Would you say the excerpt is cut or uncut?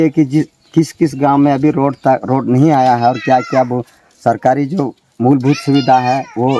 uncut